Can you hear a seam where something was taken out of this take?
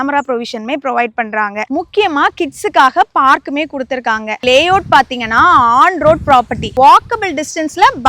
yes; 2 cuts; at 4.4 s, 6.7 s

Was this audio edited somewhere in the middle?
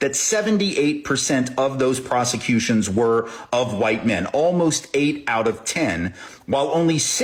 no; 0 cuts

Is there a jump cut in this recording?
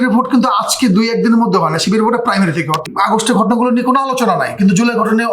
yes; 1 cut; at 2.9 s

